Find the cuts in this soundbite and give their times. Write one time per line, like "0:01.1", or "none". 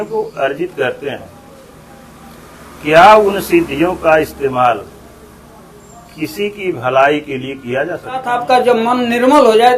0:08.3